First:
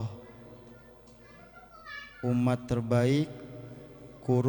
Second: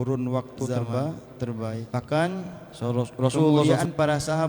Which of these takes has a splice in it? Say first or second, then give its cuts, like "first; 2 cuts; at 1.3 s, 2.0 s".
second; 3 cuts; at 1.9 s, 2.6 s, 3.6 s